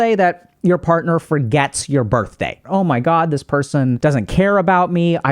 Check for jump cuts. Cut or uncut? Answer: cut